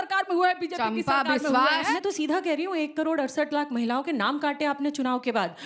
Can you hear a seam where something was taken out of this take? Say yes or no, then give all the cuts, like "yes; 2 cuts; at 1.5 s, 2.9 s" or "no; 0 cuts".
yes; 1 cut; at 1.9 s